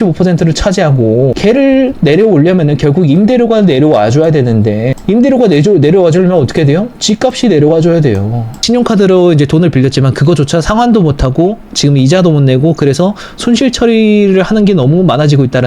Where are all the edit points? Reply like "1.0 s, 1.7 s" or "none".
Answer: 1.3 s, 4.9 s, 8.5 s

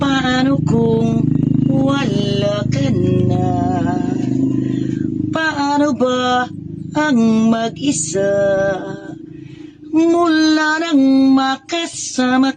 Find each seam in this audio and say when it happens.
none

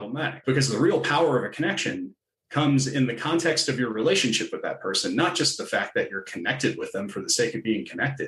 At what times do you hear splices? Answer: none

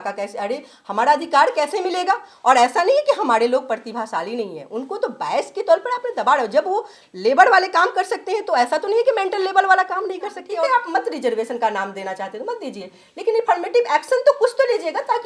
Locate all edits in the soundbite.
10.4 s

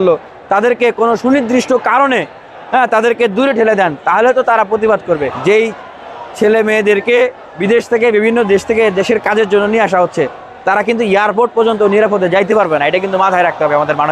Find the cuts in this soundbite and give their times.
5.3 s, 7.5 s

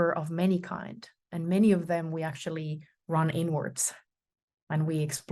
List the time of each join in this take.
none

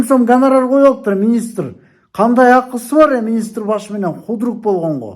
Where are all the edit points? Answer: none

